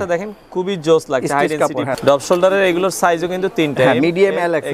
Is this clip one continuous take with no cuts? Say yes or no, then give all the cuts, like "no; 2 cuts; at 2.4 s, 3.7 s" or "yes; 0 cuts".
no; 1 cut; at 1.9 s